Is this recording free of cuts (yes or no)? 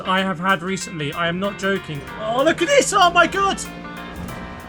no